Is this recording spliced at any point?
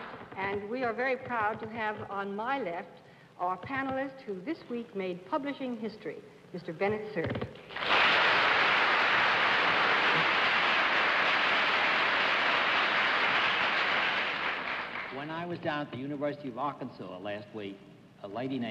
yes; 1 cut; at 1.1 s

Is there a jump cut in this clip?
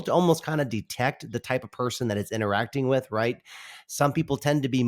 no; 0 cuts

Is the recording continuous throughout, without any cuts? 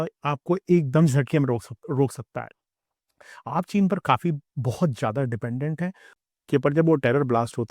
no; 1 cut; at 6.1 s

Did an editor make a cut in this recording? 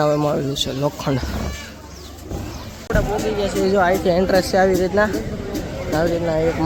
no; 0 cuts

